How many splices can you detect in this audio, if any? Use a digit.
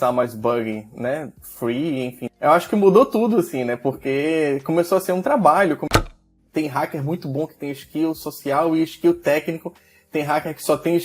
2